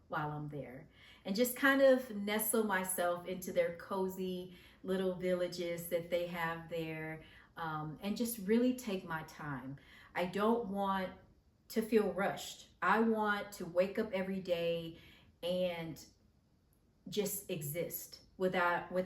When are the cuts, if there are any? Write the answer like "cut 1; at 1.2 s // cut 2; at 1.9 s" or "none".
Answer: none

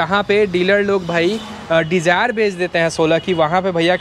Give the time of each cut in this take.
none

